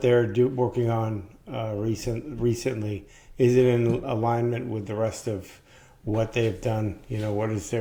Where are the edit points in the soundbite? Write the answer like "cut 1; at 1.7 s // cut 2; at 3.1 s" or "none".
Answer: none